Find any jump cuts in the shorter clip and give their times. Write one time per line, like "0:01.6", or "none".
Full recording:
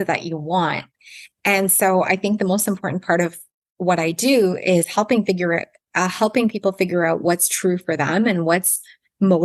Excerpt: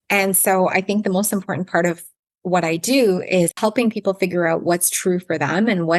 0:03.5